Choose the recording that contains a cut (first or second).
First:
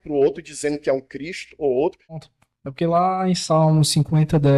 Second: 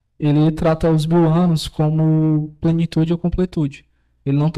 first